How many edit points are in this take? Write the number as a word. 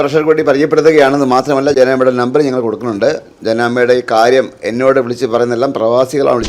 zero